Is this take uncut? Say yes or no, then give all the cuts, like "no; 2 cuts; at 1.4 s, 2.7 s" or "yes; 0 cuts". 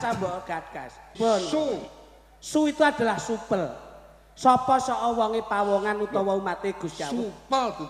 no; 1 cut; at 1.2 s